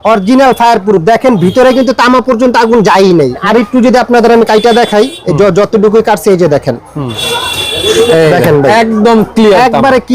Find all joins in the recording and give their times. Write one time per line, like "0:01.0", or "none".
0:03.4
0:07.2